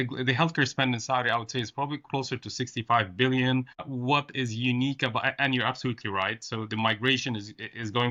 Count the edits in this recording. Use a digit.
0